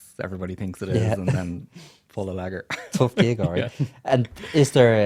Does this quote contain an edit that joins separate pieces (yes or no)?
no